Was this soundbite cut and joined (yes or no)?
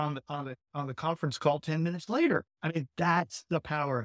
yes